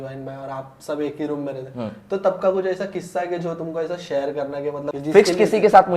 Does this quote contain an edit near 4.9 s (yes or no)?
yes